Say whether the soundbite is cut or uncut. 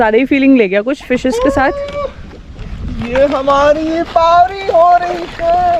uncut